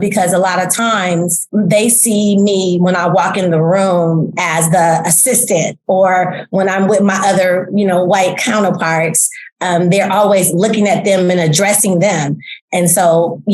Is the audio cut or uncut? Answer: cut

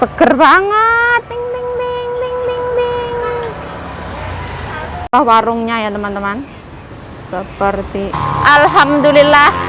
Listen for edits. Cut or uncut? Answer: uncut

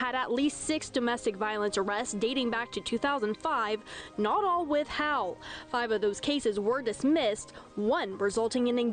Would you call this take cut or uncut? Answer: uncut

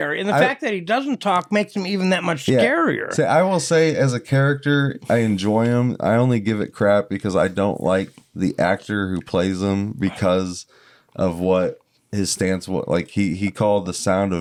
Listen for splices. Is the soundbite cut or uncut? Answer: uncut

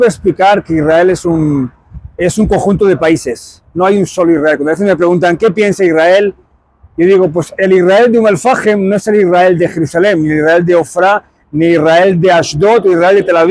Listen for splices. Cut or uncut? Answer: uncut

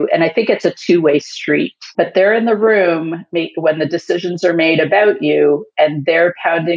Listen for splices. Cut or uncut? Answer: cut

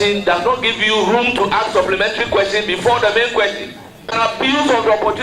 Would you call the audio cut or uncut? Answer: cut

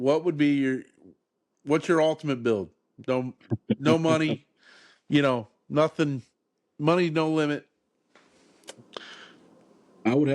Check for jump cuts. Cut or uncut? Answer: uncut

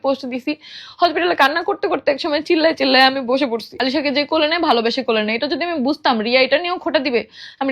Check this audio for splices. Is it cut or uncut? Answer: cut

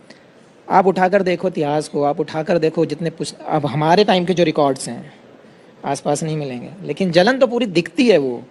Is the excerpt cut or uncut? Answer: uncut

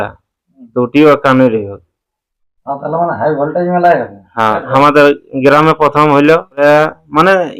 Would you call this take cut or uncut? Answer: cut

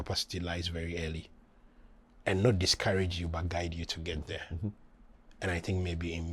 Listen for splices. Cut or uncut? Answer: uncut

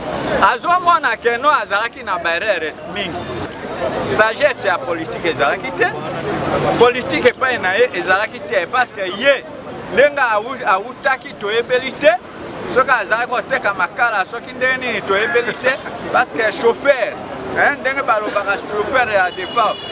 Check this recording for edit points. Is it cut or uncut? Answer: cut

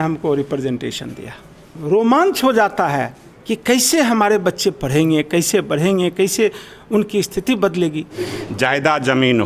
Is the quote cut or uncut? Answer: cut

